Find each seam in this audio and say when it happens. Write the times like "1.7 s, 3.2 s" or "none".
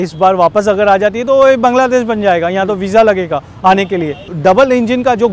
4.3 s

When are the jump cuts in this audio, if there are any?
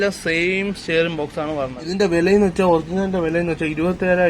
1.9 s

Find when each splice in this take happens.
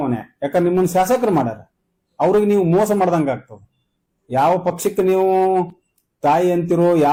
none

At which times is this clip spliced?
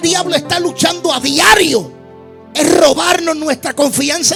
none

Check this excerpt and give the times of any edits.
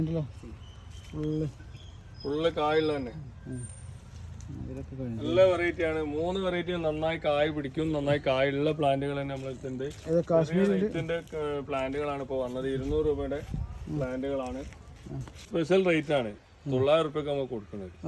15.5 s

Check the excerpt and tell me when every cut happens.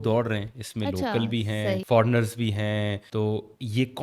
1.8 s, 3.0 s

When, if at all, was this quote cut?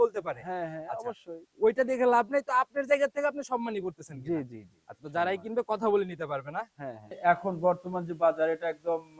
7.1 s

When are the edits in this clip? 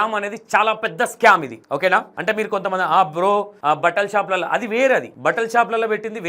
1.5 s

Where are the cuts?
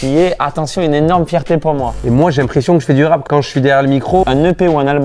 2.0 s, 3.2 s, 4.2 s

